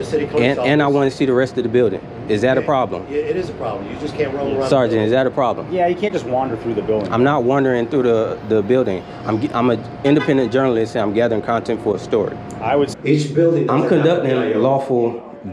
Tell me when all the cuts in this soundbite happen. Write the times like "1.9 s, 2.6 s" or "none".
13.0 s

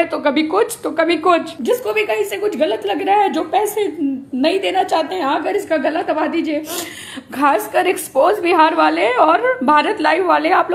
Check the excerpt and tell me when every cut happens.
1.5 s

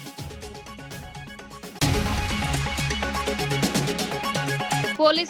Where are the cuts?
0.9 s

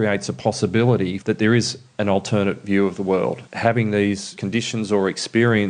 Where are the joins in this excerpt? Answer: 1.2 s, 3.5 s, 4.3 s

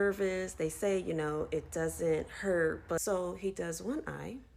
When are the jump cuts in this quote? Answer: 3.0 s

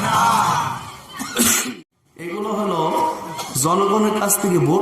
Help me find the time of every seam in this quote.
1.6 s

